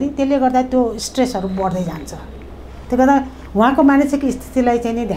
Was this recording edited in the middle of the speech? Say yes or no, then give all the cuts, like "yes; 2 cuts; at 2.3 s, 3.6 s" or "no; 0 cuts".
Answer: no; 0 cuts